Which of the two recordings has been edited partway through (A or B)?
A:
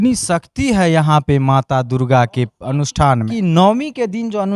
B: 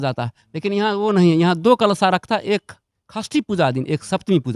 A